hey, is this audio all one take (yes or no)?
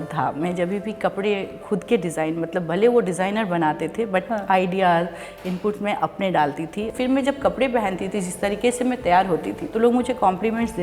no